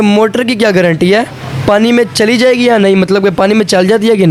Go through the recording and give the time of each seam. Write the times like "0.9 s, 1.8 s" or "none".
none